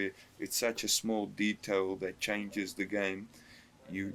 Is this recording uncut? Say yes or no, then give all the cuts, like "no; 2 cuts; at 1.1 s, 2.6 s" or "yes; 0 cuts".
yes; 0 cuts